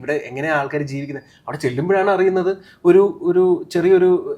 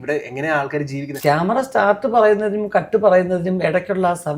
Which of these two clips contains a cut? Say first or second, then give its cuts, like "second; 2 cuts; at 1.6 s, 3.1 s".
second; 1 cut; at 1.0 s